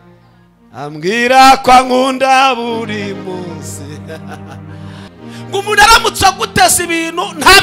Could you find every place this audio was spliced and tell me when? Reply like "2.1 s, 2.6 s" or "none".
5.1 s